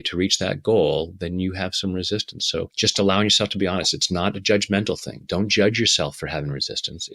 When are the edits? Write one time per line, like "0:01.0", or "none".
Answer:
0:02.7

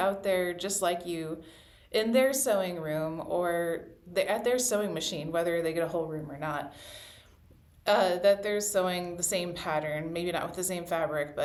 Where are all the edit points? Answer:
none

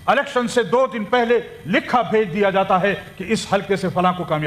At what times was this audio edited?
none

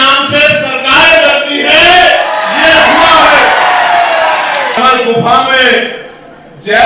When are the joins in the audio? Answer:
0:04.8

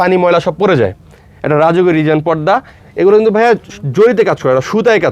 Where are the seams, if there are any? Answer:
0:02.8

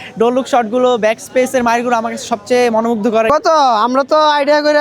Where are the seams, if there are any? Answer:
0:03.3

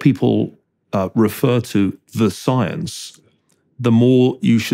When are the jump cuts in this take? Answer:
none

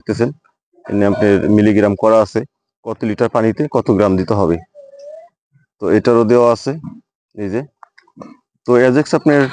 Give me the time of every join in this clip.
none

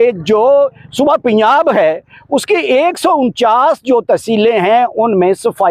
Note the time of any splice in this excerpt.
none

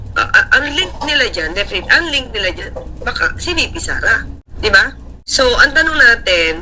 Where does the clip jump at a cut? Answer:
0:04.4
0:05.1

